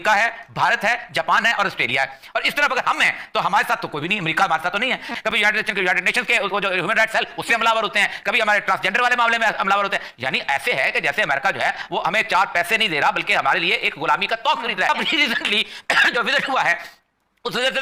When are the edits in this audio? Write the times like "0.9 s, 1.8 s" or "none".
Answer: none